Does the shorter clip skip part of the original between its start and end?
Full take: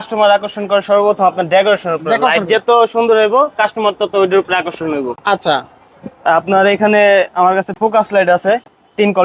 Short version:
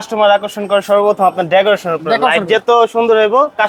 no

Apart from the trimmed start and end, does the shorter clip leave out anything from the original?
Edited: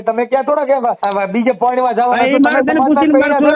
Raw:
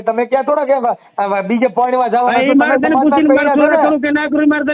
yes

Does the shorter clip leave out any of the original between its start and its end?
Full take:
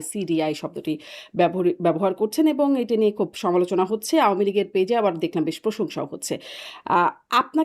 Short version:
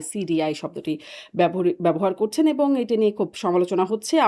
no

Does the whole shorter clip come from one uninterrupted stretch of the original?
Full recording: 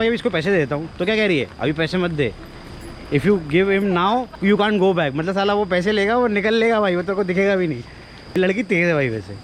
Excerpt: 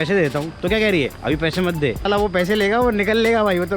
no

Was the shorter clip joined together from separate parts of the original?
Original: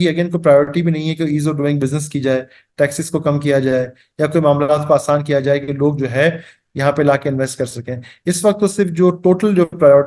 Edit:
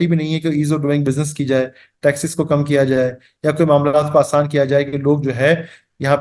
no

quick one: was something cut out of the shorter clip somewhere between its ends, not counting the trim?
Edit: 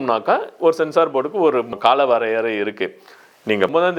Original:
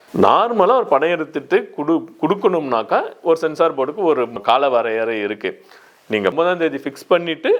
no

